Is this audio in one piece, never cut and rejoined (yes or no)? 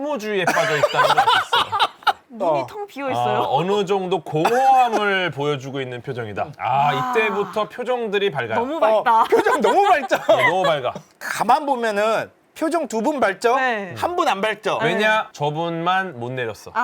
no